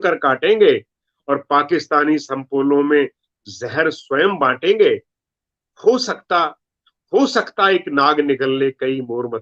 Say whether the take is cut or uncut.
uncut